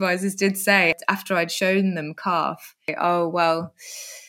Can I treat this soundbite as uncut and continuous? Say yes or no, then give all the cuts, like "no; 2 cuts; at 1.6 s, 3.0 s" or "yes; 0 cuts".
no; 2 cuts; at 0.9 s, 2.9 s